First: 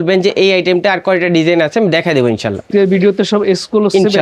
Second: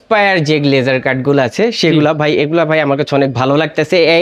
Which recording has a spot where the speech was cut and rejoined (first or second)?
first